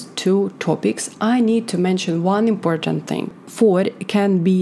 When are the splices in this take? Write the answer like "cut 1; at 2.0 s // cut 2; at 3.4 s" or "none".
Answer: cut 1; at 3.4 s